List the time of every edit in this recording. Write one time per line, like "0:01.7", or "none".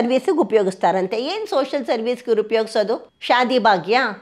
0:03.1